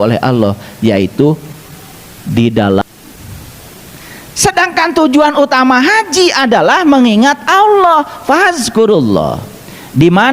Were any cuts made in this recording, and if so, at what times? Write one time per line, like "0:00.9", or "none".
0:02.8